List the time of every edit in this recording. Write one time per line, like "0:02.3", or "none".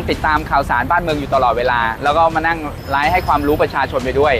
0:02.0